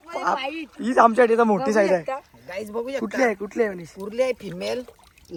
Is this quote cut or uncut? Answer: uncut